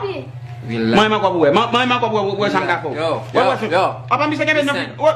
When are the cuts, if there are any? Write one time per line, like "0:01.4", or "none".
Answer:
0:00.9